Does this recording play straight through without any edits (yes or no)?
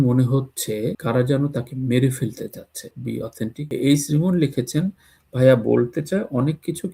no